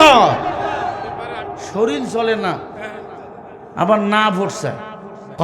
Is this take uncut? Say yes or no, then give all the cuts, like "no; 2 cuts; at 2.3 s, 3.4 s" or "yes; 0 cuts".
no; 1 cut; at 1.6 s